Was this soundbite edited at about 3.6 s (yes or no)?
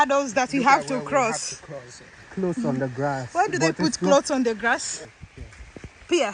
no